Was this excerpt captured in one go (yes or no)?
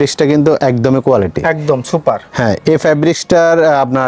yes